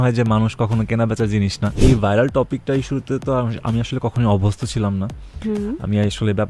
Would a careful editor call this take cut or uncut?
cut